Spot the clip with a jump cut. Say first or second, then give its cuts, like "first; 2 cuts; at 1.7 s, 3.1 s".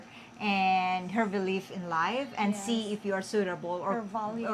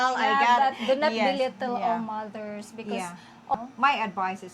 second; 1 cut; at 3.5 s